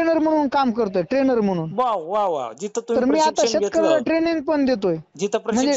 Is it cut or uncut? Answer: uncut